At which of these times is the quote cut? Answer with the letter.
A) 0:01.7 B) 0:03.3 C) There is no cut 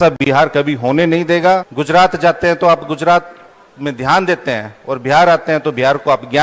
A